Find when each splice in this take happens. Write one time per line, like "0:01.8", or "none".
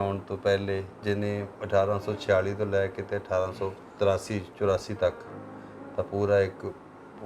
0:00.9
0:03.8